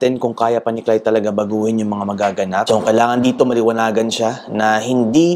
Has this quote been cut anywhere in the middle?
yes; 1 cut; at 2.6 s

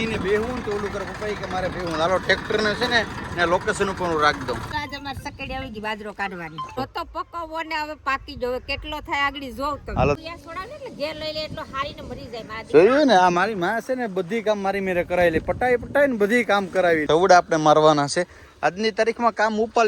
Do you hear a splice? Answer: yes; 4 cuts; at 4.7 s, 6.8 s, 10.2 s, 17.0 s

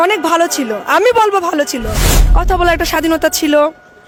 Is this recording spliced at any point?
no; 0 cuts

